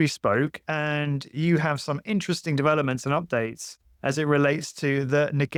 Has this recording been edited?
no; 0 cuts

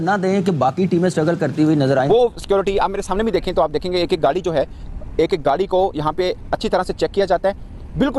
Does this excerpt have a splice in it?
yes; 1 cut; at 2.3 s

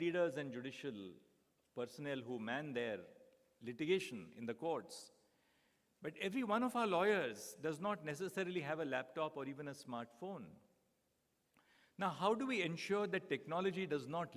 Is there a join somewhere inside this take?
no; 0 cuts

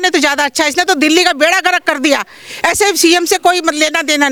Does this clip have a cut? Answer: no; 0 cuts

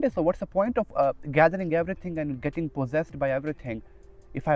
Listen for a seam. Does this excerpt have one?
no; 0 cuts

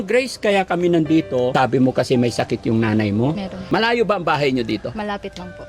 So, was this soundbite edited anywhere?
yes; 2 cuts; at 1.5 s, 3.5 s

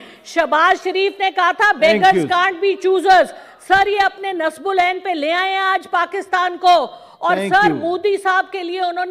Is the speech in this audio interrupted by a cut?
no; 0 cuts

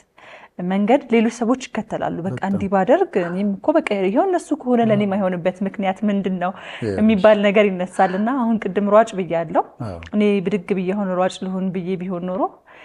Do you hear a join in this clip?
no; 0 cuts

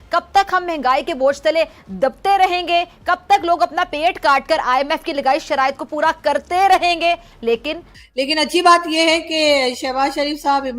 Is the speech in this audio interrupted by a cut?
yes; 1 cut; at 7.9 s

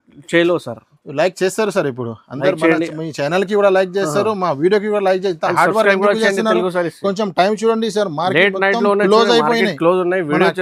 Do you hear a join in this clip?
no; 0 cuts

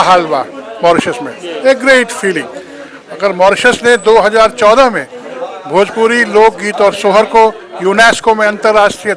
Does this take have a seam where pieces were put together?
no; 0 cuts

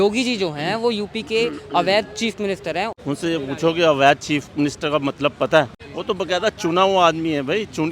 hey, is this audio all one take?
no; 2 cuts; at 2.9 s, 5.9 s

